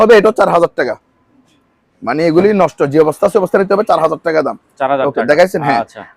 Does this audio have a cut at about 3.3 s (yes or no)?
no